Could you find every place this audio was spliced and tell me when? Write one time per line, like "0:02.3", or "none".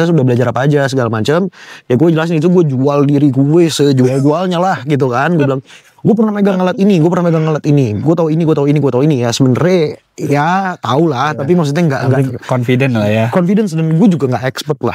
none